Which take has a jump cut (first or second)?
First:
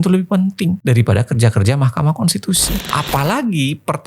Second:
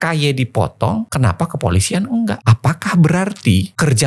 first